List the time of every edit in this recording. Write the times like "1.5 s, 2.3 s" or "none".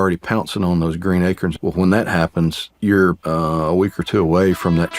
1.5 s, 2.7 s, 3.2 s